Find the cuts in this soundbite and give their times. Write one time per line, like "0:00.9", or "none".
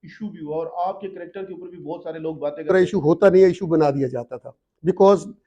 0:02.7